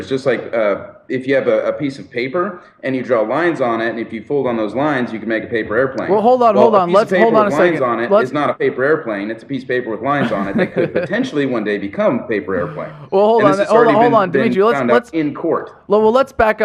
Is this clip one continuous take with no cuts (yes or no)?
yes